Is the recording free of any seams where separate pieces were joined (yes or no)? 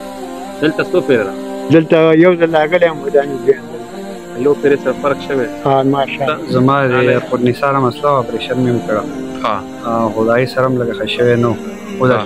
no